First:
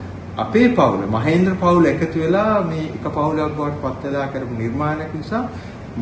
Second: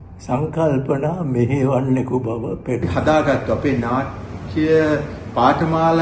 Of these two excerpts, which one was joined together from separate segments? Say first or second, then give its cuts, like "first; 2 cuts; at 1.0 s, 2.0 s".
second; 1 cut; at 2.9 s